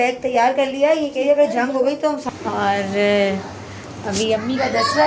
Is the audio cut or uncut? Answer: cut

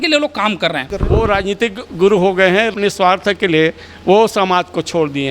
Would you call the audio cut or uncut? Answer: cut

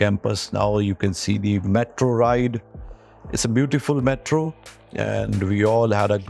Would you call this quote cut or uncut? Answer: uncut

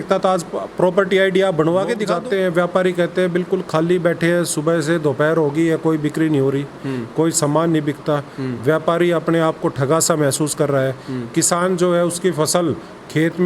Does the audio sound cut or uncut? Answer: cut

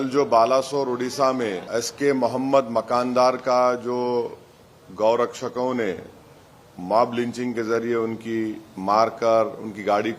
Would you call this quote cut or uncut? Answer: cut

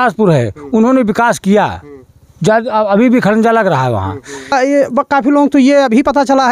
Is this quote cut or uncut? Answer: cut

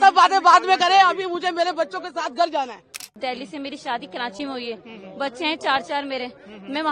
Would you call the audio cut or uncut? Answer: cut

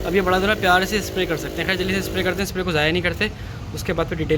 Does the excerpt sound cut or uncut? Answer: uncut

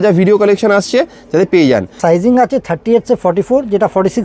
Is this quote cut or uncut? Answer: cut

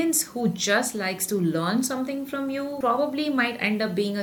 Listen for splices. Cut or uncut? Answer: uncut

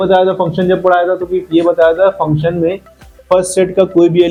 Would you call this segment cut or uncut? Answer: uncut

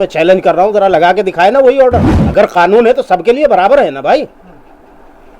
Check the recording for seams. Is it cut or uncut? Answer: cut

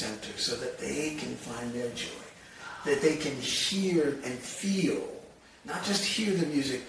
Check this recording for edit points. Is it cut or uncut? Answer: uncut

